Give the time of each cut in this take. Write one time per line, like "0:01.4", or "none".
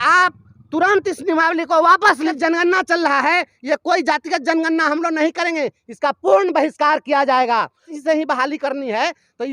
0:02.3
0:07.9